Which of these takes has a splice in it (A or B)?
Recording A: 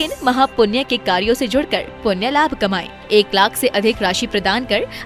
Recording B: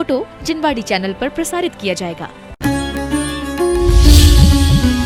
B